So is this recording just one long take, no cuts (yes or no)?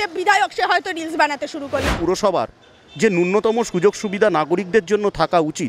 no